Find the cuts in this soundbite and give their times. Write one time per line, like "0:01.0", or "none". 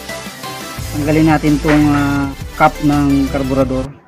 0:02.3